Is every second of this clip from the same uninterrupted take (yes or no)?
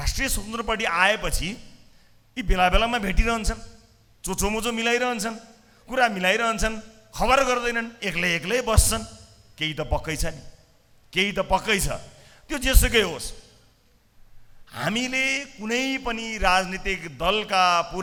yes